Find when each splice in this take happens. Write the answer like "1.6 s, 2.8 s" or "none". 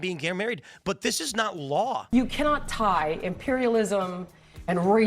2.1 s